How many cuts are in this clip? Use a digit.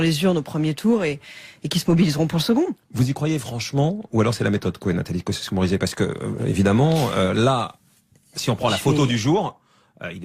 1